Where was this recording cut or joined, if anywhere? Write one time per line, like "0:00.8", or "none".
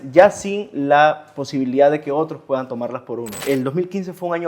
0:03.4